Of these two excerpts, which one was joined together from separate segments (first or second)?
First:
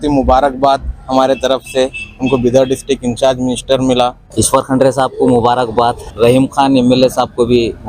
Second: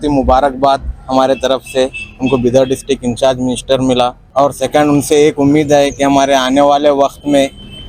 first